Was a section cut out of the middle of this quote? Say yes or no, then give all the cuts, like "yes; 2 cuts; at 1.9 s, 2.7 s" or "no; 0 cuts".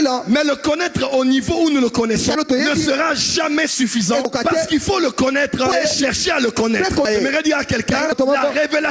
yes; 5 cuts; at 2.4 s, 4.3 s, 5.7 s, 7.0 s, 8.1 s